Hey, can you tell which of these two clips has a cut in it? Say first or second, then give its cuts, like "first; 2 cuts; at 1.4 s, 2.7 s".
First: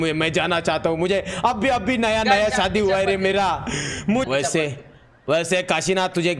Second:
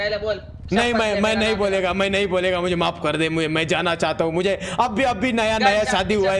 first; 1 cut; at 4.3 s